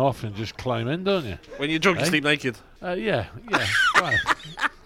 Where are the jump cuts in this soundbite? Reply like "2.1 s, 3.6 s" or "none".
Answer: 1.5 s, 2.7 s